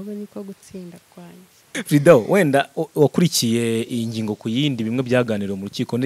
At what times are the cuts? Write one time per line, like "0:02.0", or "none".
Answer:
0:01.7